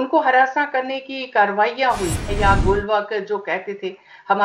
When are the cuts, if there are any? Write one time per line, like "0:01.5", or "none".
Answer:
0:02.3